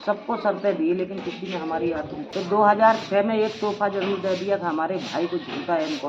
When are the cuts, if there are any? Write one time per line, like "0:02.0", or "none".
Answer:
0:02.2